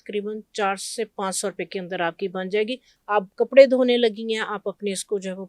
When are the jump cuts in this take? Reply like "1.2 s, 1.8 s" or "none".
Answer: 2.9 s